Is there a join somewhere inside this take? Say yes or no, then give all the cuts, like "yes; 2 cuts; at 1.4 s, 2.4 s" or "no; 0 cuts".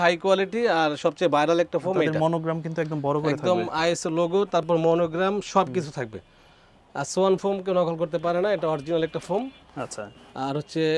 no; 0 cuts